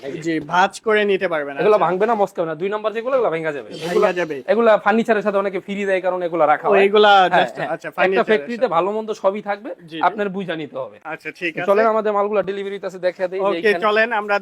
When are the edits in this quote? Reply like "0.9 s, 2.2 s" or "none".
none